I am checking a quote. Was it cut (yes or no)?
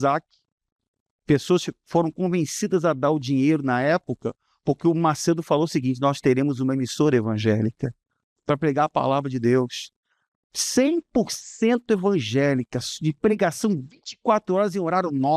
no